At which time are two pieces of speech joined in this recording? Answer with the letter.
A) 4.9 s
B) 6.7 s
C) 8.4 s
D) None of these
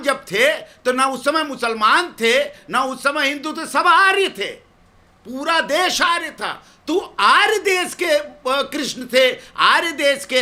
D